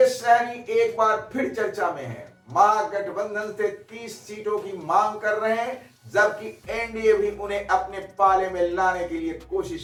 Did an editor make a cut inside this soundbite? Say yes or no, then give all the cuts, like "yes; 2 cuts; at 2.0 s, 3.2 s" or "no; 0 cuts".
no; 0 cuts